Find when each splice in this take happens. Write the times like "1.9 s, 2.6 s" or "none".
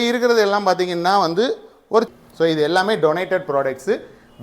2.1 s